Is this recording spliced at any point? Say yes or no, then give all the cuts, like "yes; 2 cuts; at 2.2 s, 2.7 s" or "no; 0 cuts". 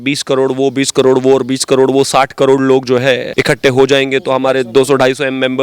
yes; 1 cut; at 3.3 s